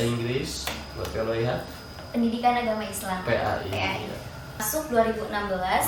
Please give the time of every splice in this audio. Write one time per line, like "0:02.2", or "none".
0:04.6

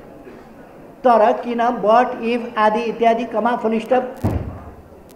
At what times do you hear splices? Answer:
none

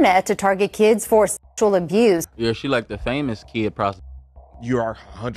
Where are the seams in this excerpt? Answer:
0:02.3

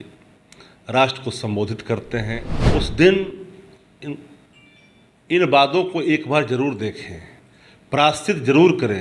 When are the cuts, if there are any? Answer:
0:02.5

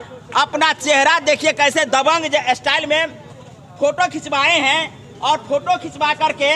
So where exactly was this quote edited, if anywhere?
none

